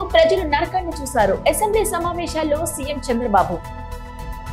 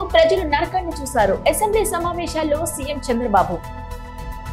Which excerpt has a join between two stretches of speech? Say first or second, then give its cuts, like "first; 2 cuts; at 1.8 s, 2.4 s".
first; 1 cut; at 3.6 s